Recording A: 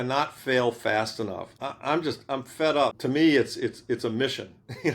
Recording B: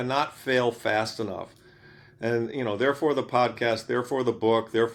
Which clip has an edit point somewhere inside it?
A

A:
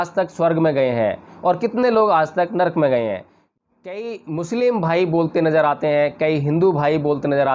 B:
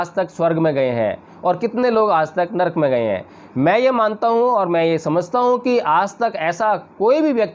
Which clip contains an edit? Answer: A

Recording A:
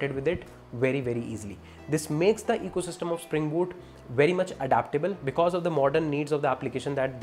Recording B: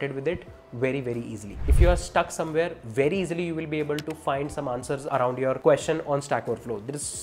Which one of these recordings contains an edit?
B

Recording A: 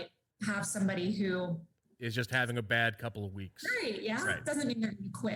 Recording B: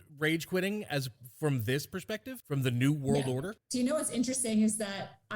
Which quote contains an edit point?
B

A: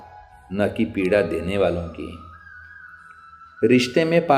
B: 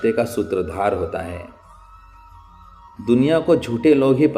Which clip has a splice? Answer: B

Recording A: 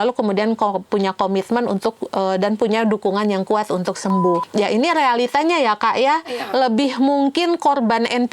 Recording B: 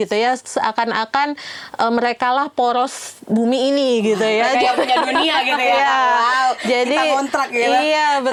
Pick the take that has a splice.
A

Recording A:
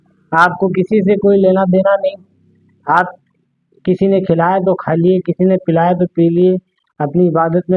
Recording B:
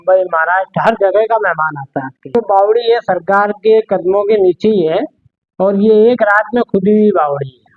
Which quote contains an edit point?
B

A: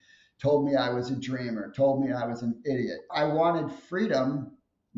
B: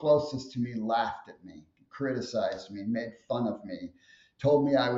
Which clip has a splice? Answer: A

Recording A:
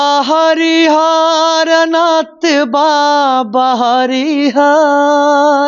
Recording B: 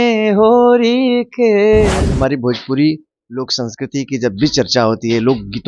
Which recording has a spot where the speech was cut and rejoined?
B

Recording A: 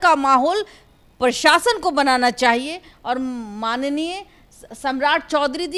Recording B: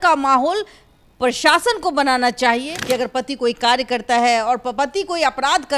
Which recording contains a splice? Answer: B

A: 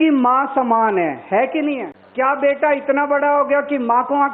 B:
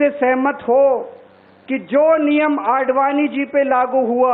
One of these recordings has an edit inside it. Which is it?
A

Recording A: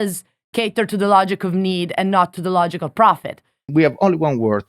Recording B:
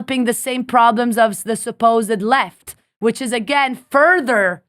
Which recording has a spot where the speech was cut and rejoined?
A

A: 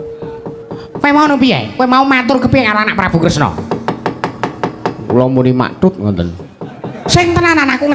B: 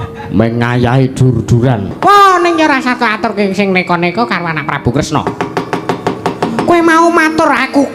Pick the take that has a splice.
B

